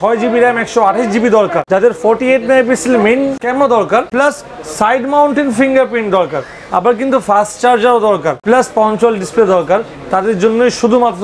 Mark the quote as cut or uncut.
uncut